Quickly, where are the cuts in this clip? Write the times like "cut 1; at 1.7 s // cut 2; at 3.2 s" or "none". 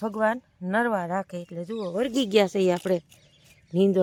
none